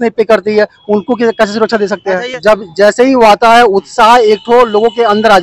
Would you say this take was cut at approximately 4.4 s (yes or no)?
no